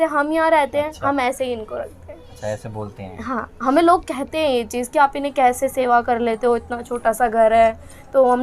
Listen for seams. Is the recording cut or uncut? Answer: uncut